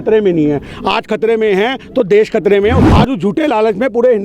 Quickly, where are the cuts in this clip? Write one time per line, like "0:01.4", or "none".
0:02.8